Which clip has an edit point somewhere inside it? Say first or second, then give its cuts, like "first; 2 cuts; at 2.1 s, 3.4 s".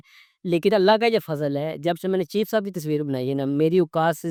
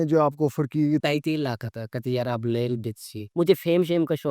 second; 2 cuts; at 1.0 s, 3.2 s